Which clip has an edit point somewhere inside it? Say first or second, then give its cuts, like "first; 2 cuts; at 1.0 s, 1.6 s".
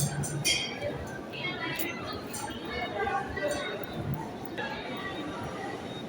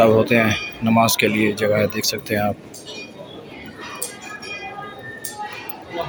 first; 1 cut; at 4.6 s